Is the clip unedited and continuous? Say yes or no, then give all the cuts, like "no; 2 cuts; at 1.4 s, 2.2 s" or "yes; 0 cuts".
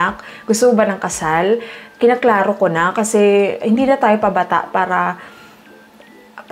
yes; 0 cuts